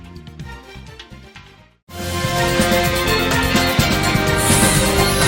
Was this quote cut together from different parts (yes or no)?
no